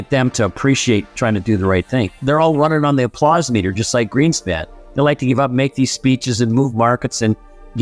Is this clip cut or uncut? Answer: cut